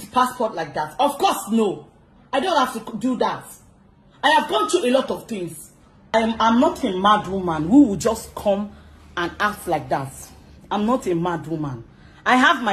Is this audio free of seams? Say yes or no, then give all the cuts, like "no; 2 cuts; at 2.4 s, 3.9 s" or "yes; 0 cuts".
no; 1 cut; at 6.1 s